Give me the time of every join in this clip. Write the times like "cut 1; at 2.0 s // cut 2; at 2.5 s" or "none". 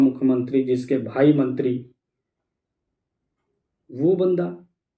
none